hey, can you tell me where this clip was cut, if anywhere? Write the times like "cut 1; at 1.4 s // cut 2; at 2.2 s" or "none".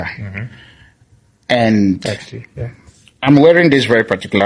none